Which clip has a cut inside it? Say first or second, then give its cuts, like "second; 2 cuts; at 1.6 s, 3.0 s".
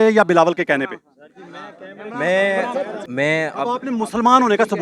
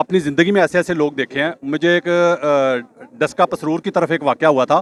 first; 1 cut; at 3.0 s